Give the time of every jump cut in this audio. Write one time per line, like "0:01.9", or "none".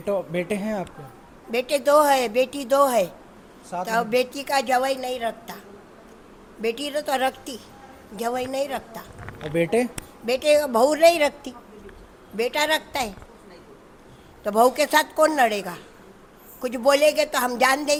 none

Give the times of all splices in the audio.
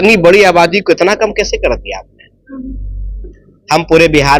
none

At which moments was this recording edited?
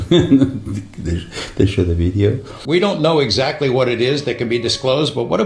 0:02.5

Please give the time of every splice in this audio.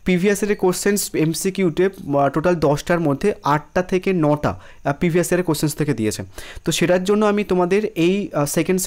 none

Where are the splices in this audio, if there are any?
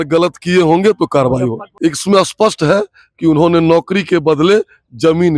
0:01.7

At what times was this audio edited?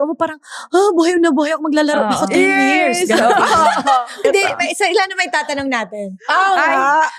0:04.2

